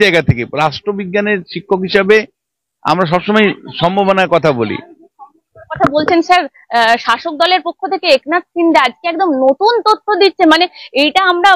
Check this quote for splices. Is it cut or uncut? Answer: uncut